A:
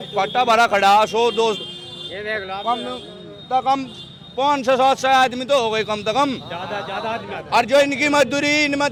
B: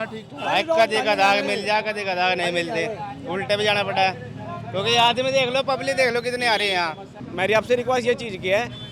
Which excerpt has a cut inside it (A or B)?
B